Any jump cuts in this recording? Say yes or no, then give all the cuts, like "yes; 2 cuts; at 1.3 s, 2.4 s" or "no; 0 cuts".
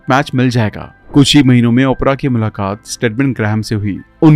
yes; 1 cut; at 0.9 s